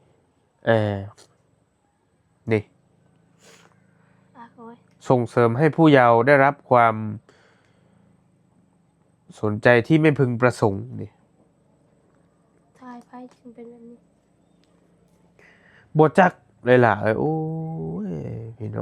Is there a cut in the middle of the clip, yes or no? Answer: no